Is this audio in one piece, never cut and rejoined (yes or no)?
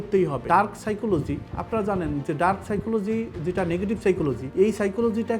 no